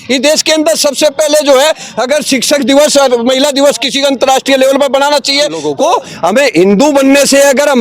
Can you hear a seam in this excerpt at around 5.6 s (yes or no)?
yes